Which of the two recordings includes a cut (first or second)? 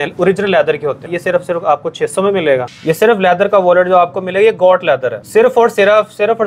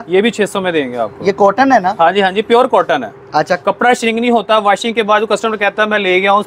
first